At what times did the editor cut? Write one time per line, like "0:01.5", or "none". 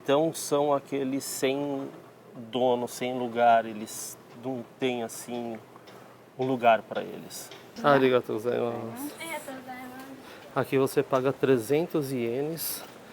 0:07.7